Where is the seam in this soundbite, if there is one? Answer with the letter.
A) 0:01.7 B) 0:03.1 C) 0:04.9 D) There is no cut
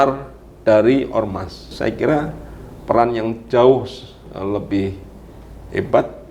A